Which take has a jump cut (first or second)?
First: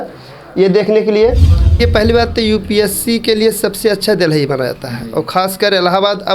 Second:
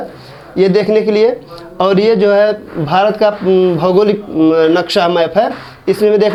first